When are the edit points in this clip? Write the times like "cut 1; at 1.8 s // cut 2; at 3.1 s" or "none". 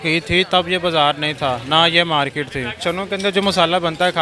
cut 1; at 2.8 s